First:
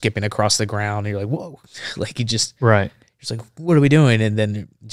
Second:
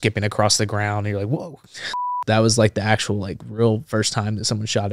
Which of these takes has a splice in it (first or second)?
second